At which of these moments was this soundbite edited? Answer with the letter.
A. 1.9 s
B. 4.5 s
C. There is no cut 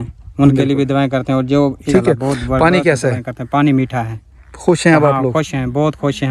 A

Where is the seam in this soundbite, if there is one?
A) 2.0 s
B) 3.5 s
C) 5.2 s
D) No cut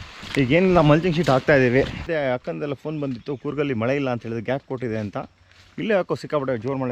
A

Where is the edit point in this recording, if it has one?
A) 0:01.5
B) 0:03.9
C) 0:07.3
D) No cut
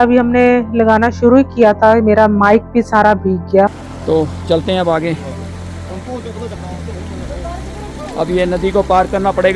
B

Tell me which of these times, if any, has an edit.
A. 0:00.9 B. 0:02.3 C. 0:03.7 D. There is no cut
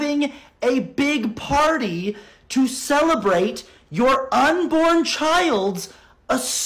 D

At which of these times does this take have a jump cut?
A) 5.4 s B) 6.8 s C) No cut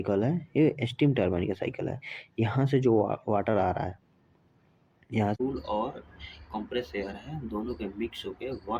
A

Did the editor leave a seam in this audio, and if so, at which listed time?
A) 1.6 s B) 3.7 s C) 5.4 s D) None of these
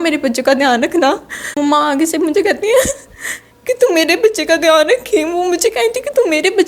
A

